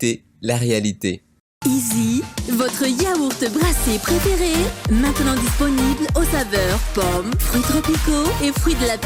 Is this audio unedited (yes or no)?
yes